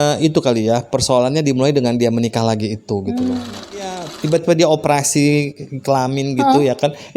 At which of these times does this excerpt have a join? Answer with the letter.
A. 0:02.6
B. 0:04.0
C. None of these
B